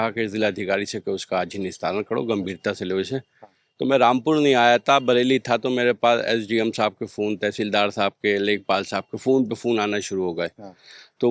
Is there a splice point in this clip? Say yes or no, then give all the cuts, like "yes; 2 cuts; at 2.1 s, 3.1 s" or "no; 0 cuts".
no; 0 cuts